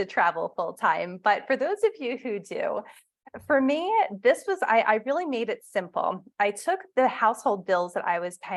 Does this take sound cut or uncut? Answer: uncut